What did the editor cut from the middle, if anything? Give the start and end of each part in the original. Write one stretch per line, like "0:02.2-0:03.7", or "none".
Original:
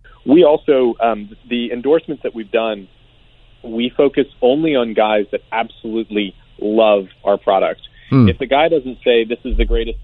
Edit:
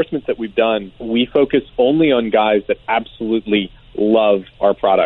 0:02.9-0:03.6

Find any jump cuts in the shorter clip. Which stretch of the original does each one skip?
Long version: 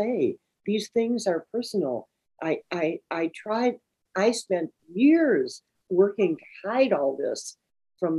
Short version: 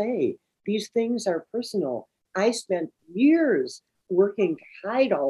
0:02.2-0:04.0

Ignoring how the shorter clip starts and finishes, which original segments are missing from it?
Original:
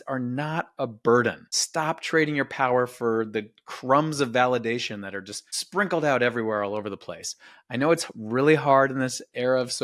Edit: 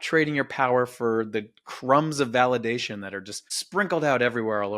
none

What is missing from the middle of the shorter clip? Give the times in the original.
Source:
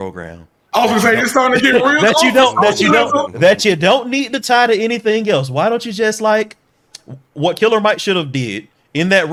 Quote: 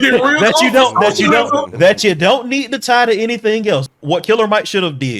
0:05.5-0:07.2

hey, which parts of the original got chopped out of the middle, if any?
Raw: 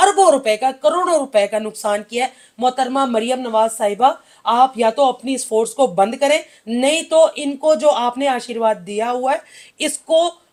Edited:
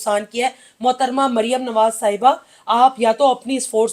none

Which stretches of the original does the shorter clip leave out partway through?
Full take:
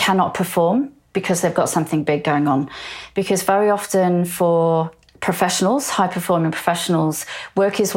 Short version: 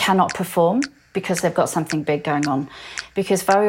none

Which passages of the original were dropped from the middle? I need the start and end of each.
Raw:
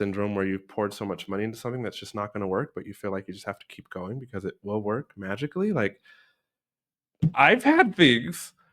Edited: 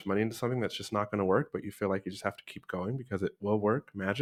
none

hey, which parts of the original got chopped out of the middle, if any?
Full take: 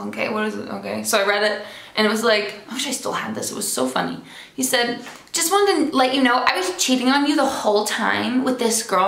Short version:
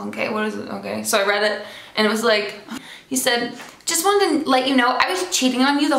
0:02.8-0:04.2

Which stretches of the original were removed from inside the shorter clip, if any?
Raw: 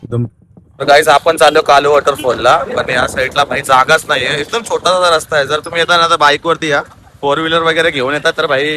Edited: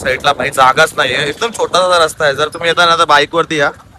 none

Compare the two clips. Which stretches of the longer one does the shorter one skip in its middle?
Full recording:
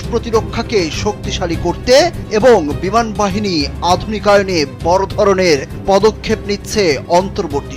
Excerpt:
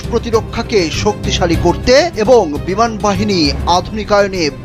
0:02.1-0:02.3

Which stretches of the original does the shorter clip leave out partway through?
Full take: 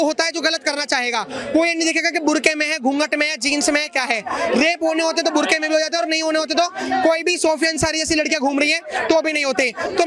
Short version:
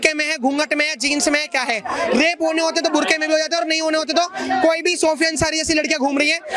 none

